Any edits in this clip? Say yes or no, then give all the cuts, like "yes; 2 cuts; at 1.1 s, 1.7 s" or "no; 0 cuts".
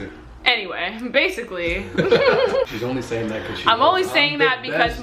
yes; 1 cut; at 2.7 s